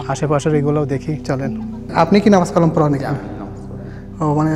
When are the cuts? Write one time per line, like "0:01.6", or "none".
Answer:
0:01.9